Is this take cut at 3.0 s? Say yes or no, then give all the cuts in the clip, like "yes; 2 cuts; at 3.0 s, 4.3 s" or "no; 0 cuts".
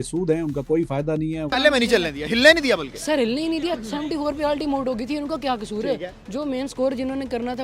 no; 1 cut; at 1.5 s